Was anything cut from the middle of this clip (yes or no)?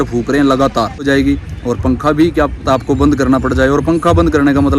yes